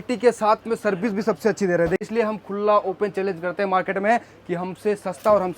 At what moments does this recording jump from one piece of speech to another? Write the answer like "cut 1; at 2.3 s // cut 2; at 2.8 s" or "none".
cut 1; at 2.0 s

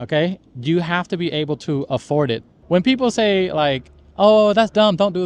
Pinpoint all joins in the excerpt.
cut 1; at 2.5 s

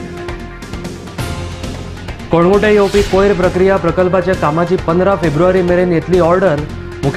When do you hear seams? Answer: none

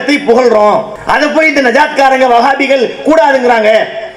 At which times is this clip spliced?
cut 1; at 0.9 s

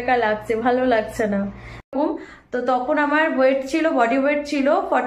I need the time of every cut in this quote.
cut 1; at 1.9 s

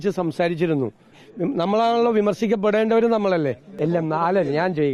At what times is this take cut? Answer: cut 1; at 1.2 s // cut 2; at 3.7 s

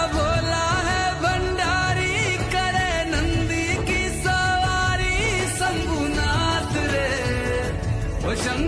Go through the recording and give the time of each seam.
none

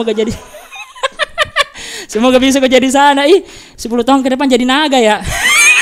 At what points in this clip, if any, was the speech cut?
none

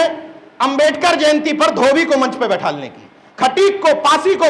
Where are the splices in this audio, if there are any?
cut 1; at 3.2 s

